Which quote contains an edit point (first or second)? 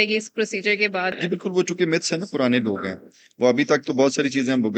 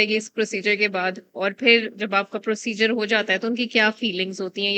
first